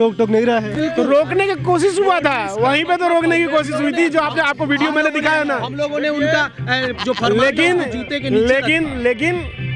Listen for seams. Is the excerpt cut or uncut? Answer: uncut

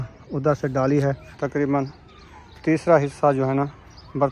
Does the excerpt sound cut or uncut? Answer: cut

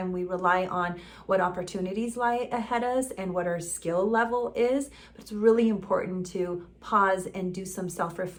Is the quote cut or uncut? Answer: uncut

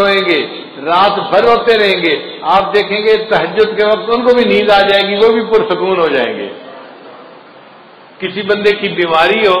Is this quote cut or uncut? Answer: uncut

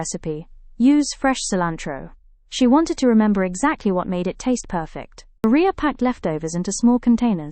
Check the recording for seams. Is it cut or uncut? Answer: cut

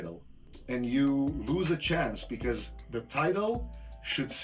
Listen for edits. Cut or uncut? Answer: uncut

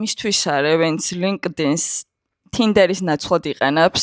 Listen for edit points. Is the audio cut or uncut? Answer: uncut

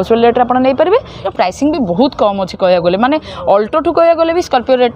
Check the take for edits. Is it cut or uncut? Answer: cut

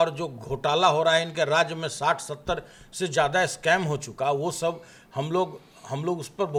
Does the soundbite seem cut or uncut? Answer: uncut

